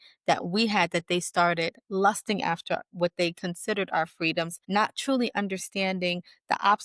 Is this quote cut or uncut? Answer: cut